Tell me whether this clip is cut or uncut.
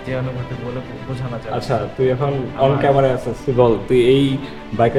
uncut